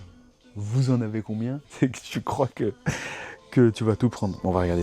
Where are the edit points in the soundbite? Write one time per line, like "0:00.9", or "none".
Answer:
0:01.6